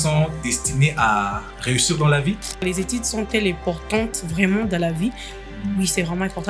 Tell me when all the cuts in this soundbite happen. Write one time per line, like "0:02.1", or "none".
0:02.6